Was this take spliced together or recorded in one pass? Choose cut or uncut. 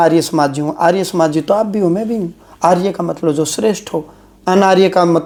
uncut